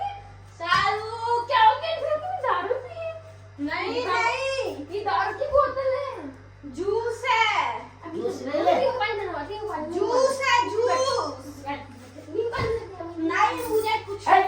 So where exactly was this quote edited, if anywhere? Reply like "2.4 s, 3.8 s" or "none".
none